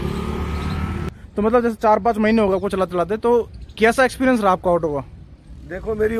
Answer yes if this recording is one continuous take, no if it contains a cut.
no